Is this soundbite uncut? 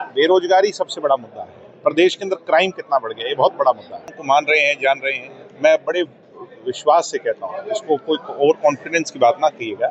no; 1 cut; at 4.1 s

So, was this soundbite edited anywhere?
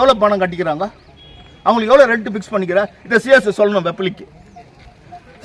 no; 0 cuts

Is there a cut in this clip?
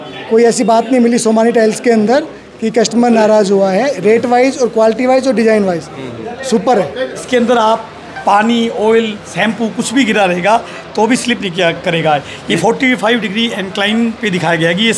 yes; 1 cut; at 7.2 s

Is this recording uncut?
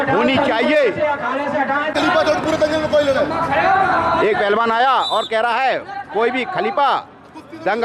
no; 1 cut; at 1.9 s

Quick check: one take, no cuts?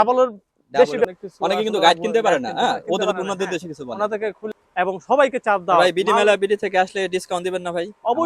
no; 2 cuts; at 1.1 s, 4.4 s

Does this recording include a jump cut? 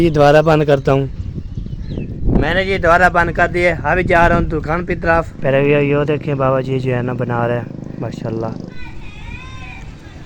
yes; 3 cuts; at 2.2 s, 5.3 s, 8.7 s

